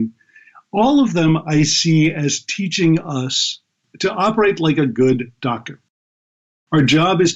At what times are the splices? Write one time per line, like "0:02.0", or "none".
0:03.8
0:06.0

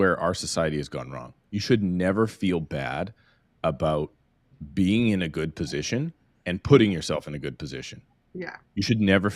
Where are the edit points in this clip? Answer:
none

